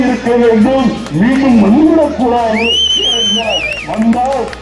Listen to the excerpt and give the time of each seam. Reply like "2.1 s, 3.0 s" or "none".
none